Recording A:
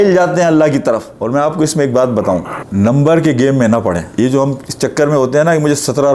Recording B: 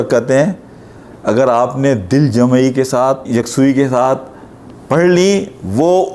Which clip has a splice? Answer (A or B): A